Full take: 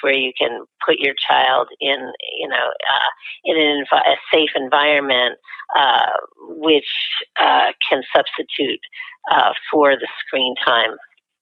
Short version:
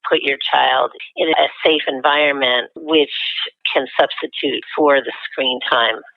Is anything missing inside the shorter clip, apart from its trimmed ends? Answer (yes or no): yes